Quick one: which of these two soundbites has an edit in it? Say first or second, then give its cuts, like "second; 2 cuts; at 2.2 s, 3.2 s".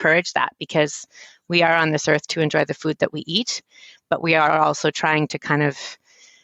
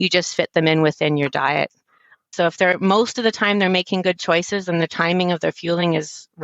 second; 1 cut; at 2.3 s